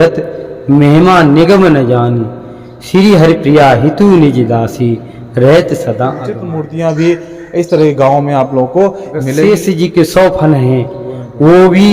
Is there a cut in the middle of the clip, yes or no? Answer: yes